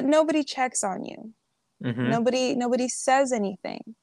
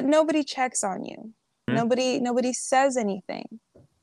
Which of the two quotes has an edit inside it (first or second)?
second